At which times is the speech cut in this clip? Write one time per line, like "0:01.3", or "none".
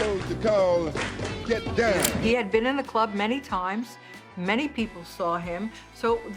0:02.1